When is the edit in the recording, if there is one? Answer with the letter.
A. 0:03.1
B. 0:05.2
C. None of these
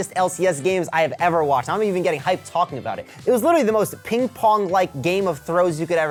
C